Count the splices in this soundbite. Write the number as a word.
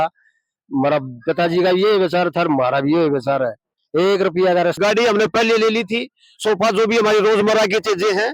one